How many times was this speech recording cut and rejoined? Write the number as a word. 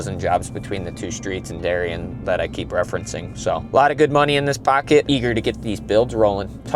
one